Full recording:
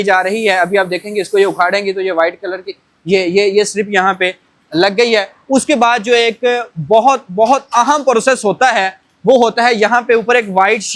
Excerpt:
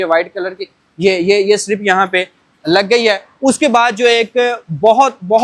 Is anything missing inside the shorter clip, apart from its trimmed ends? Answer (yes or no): no